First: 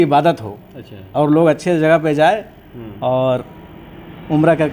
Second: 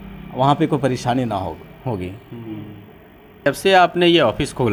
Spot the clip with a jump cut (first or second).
second